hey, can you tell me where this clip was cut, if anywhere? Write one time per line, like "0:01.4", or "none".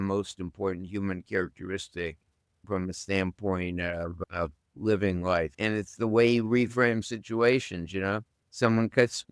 0:02.7
0:04.1